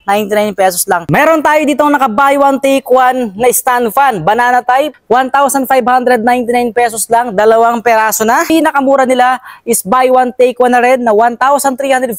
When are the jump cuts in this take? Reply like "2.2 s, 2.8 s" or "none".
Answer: 1.0 s, 5.0 s, 8.5 s